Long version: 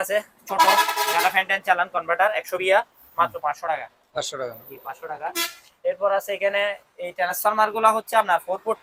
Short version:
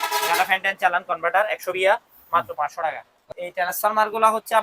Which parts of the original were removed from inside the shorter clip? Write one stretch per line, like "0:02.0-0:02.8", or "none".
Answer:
0:04.1-0:06.8